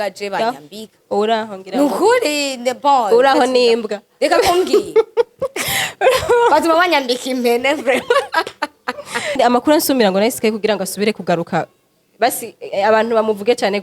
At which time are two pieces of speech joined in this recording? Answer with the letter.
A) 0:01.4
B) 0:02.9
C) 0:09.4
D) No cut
C